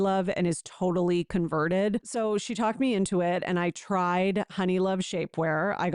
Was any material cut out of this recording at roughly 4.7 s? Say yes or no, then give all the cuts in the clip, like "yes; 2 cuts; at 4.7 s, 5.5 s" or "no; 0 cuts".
no; 1 cut; at 2.1 s